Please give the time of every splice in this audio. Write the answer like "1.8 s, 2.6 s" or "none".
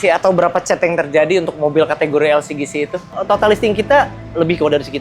3.2 s